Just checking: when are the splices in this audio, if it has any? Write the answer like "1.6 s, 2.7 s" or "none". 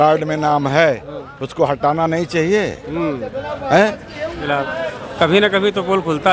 4.7 s